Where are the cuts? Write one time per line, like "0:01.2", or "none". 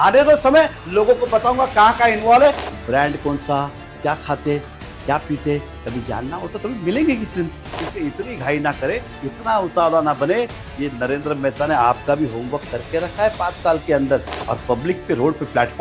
0:02.6
0:07.8
0:14.3